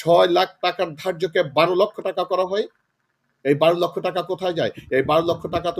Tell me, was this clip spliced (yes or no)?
no